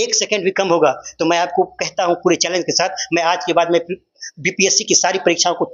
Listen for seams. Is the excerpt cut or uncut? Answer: uncut